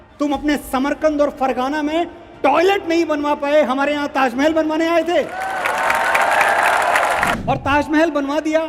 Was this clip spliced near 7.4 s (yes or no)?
yes